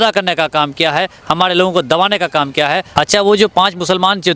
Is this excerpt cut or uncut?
cut